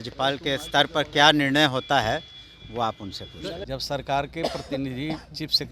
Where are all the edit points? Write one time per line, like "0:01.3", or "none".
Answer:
0:03.7